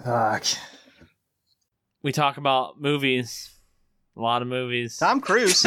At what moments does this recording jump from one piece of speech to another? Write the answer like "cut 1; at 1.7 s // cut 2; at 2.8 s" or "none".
none